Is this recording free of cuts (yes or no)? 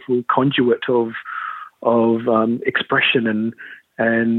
yes